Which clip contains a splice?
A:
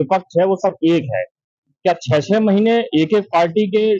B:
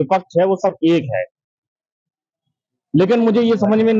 A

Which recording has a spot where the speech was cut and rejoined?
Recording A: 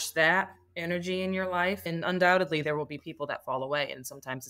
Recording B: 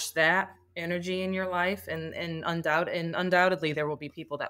A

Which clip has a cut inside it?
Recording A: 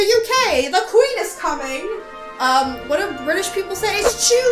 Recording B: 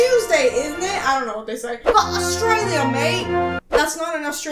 B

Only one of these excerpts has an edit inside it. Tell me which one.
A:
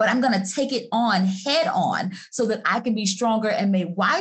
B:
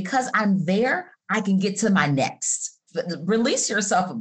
B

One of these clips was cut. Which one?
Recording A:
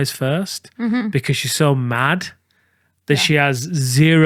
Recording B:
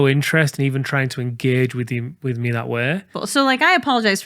B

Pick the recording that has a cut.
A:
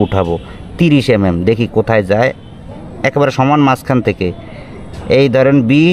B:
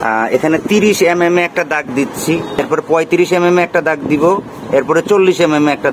B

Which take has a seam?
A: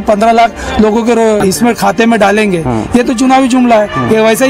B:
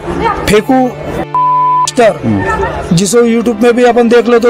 A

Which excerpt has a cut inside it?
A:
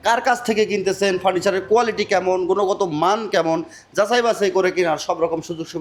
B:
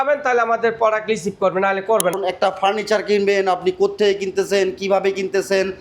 B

